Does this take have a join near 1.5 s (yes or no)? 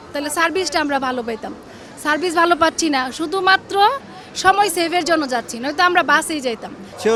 no